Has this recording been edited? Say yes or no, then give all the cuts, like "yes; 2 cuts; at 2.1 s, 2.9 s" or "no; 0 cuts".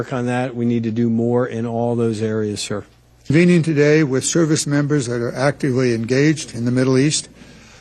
yes; 1 cut; at 3.3 s